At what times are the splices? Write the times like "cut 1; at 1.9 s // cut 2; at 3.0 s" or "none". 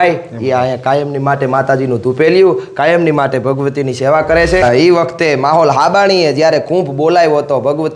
cut 1; at 4.6 s